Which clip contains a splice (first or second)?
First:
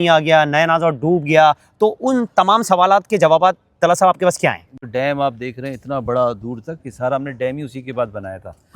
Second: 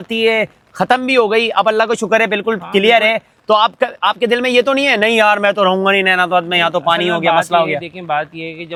first